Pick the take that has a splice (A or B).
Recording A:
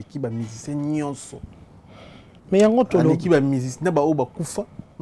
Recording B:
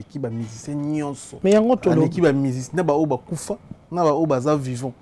B